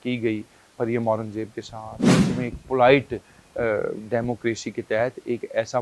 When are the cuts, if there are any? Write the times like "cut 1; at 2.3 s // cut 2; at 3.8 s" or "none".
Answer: cut 1; at 2.0 s